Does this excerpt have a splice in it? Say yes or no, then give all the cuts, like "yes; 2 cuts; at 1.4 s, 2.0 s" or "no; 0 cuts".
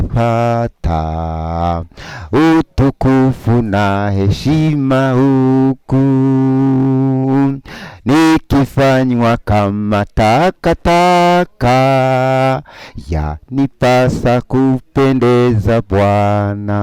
no; 0 cuts